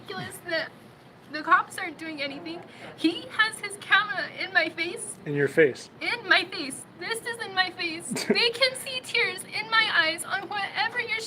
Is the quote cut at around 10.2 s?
yes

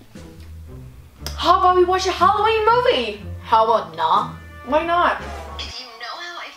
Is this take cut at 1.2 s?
yes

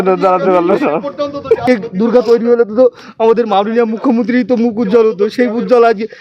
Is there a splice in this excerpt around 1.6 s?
yes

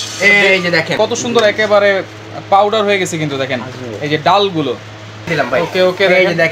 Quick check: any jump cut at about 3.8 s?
no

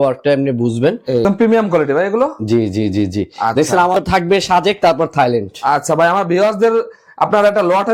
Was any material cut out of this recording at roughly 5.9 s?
no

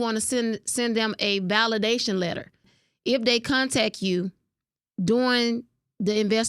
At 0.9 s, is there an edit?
no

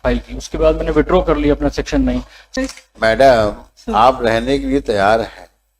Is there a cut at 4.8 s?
no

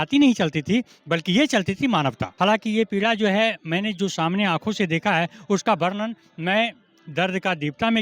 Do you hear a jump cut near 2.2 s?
yes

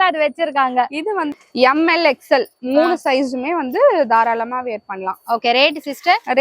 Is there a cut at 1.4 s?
yes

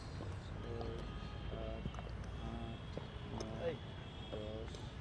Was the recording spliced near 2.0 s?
no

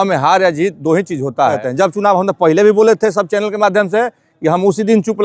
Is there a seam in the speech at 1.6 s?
yes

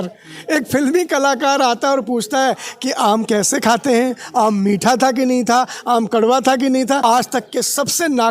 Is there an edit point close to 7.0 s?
yes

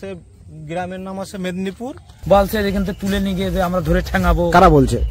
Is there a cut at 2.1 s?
yes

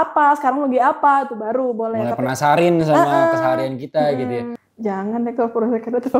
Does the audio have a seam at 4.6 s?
yes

